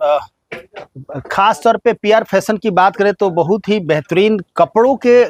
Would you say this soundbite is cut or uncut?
uncut